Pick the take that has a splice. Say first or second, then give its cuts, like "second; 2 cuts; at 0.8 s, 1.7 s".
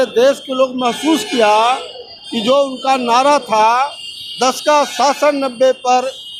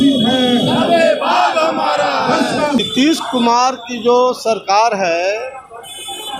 second; 1 cut; at 2.8 s